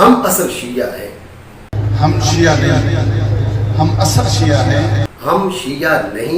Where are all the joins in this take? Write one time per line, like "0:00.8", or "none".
0:01.7
0:05.1